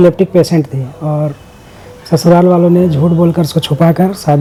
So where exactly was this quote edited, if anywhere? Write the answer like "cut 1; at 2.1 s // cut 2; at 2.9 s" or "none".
none